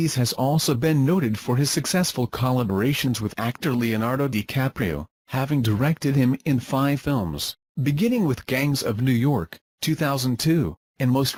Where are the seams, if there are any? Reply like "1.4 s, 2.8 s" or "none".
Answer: none